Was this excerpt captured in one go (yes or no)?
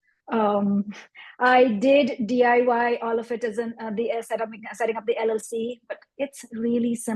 no